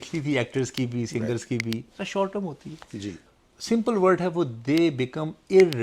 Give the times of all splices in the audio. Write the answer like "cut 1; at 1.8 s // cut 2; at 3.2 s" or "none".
cut 1; at 3.3 s